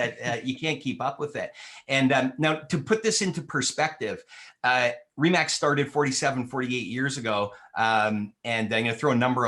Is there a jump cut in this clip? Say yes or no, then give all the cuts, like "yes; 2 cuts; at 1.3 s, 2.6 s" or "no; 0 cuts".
no; 0 cuts